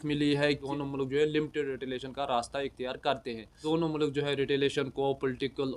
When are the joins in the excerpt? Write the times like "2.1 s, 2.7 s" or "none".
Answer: none